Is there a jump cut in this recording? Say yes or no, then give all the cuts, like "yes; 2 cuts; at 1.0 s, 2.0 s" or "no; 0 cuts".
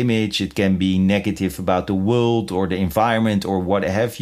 no; 0 cuts